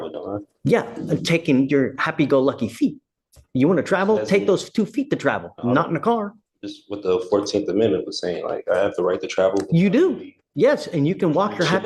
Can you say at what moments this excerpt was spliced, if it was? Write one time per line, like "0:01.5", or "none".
none